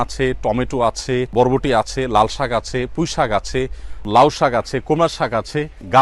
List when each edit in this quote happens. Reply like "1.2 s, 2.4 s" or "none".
1.3 s, 4.1 s